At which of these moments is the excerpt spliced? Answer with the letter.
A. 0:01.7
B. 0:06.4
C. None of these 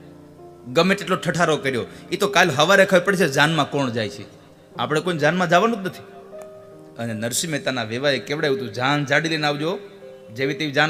C